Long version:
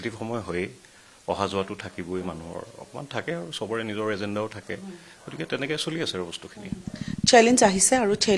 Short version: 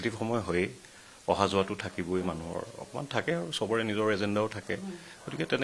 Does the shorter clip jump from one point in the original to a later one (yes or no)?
no